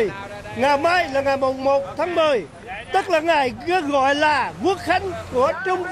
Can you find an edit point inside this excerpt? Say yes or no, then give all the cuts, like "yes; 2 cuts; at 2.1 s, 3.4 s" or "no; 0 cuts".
no; 0 cuts